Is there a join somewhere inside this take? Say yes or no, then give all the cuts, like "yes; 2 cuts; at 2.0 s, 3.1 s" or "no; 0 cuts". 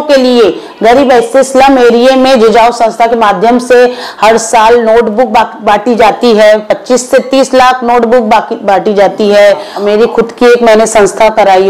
yes; 1 cut; at 9.7 s